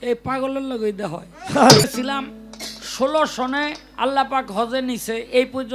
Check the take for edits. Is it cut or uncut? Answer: cut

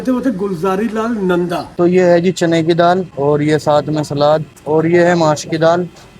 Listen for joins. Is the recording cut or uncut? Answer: cut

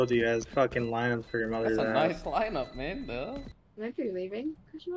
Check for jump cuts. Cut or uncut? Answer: cut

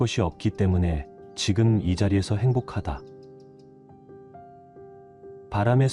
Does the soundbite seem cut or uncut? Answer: uncut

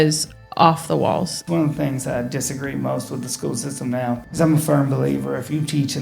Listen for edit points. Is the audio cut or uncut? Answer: cut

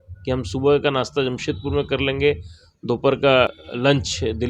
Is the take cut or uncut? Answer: cut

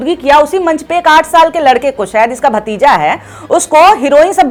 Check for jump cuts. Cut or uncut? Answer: uncut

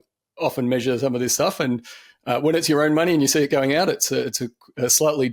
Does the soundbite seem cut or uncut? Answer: uncut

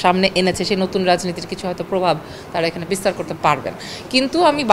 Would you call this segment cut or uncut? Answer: uncut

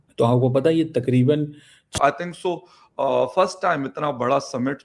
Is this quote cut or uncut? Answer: cut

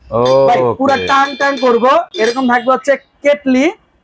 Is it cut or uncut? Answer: uncut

